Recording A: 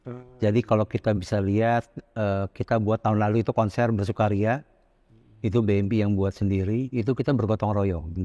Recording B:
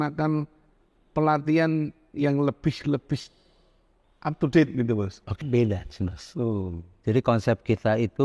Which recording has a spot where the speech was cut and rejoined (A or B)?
B